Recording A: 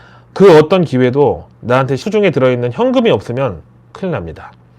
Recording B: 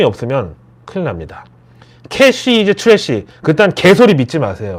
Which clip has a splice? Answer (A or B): A